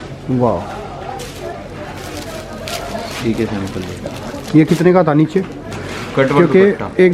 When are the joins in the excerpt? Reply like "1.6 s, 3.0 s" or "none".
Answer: 5.6 s

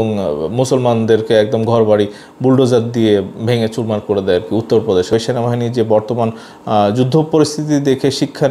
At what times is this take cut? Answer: 5.1 s

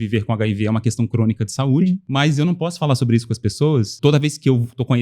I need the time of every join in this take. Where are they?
2.0 s, 3.9 s

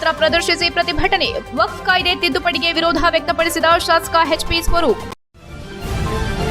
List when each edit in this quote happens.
5.1 s

